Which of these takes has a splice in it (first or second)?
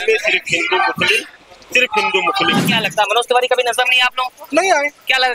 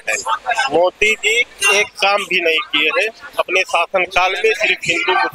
first